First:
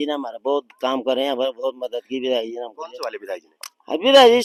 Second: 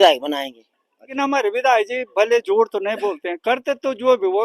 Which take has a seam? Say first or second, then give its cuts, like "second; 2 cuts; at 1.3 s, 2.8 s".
second; 1 cut; at 1.1 s